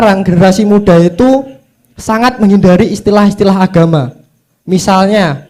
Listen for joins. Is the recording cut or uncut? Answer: uncut